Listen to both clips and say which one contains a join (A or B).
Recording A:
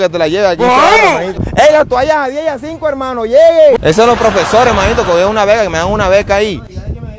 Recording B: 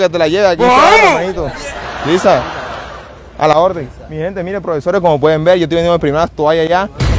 A